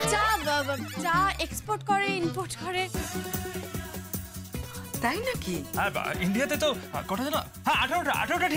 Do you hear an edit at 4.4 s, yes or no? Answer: no